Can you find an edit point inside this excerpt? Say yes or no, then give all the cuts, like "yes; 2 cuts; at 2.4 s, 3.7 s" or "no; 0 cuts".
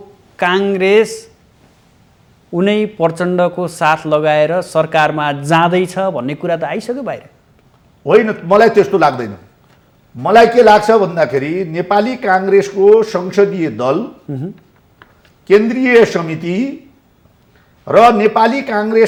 no; 0 cuts